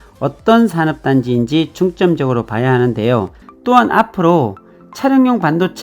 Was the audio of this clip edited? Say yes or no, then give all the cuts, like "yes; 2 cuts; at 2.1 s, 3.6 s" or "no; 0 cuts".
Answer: yes; 1 cut; at 3.4 s